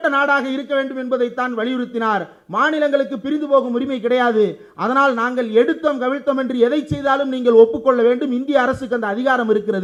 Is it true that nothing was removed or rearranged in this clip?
yes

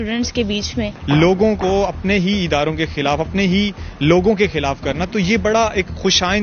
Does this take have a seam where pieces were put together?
yes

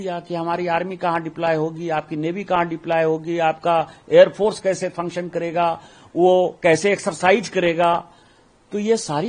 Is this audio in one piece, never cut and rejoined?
yes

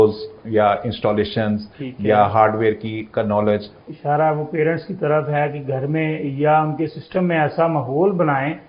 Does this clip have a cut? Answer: yes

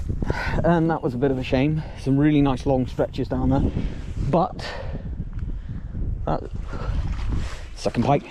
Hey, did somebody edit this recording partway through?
no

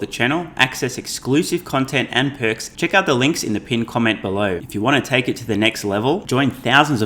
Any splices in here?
yes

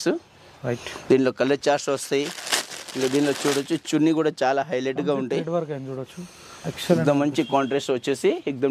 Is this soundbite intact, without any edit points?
yes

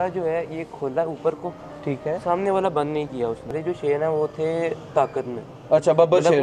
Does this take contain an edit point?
yes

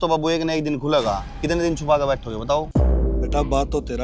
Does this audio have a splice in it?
yes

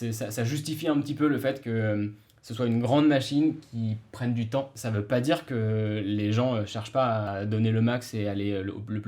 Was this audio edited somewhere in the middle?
yes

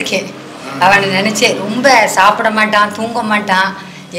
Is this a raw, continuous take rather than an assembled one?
yes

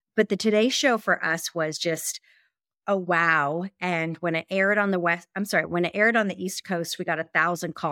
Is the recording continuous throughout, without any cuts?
yes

